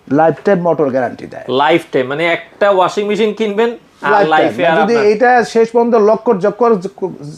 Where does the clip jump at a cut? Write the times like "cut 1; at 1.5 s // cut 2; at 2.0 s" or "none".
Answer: none